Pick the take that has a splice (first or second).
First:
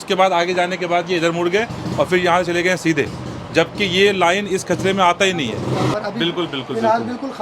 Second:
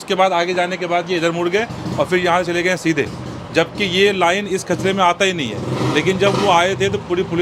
first